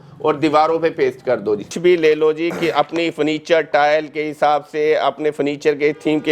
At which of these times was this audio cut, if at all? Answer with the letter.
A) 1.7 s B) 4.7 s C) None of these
A